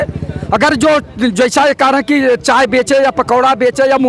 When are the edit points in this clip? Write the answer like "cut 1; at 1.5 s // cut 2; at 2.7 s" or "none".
none